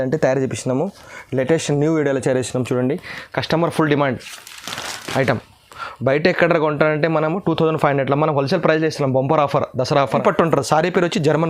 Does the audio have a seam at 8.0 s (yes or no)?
no